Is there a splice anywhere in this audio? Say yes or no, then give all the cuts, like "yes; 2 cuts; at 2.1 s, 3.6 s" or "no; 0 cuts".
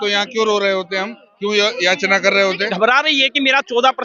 yes; 1 cut; at 2.6 s